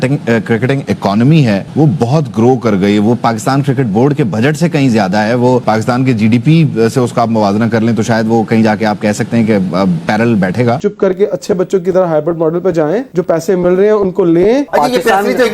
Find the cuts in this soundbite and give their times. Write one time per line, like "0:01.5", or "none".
0:10.8
0:14.7